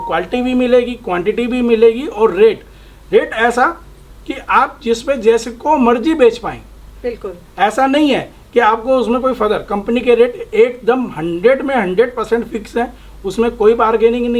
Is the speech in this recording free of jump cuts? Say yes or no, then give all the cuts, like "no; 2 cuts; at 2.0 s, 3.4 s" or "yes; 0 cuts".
yes; 0 cuts